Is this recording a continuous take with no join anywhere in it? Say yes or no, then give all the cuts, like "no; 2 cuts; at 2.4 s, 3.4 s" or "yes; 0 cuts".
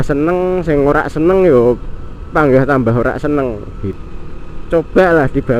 no; 1 cut; at 3.9 s